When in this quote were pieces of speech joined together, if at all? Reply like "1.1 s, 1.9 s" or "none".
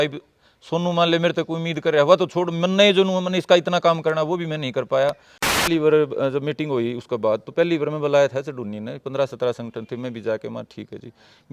5.6 s